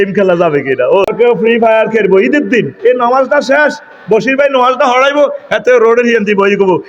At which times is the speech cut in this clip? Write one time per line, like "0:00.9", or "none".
0:01.1